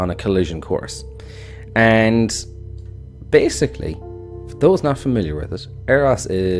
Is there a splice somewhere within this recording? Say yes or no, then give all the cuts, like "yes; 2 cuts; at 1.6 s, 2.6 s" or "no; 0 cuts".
yes; 1 cut; at 4.3 s